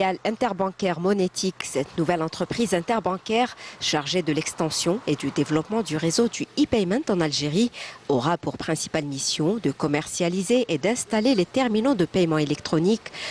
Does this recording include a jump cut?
no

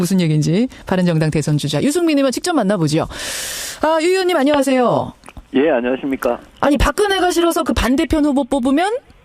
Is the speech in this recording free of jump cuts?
no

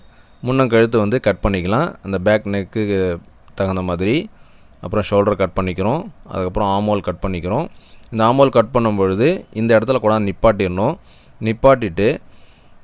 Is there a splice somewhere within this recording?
no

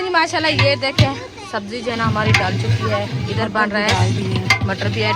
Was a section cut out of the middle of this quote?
no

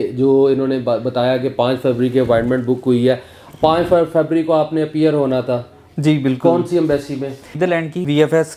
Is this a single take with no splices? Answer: yes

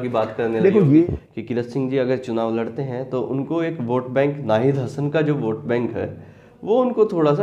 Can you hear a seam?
yes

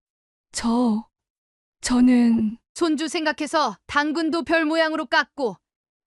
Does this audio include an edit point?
no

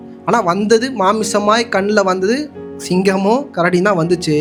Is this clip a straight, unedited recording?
yes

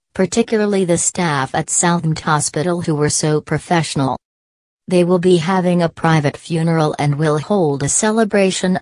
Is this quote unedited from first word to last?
no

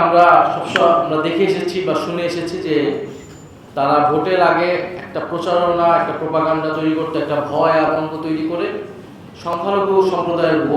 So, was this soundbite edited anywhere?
no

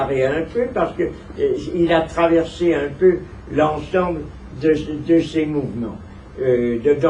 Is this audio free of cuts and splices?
yes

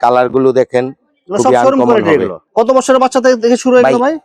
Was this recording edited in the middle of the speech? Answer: no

